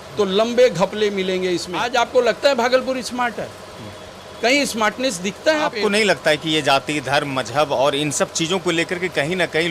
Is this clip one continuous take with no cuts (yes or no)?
no